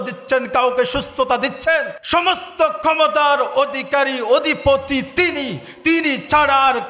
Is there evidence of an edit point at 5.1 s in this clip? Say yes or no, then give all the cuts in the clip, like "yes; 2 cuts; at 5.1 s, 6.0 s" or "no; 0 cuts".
no; 1 cut; at 2.0 s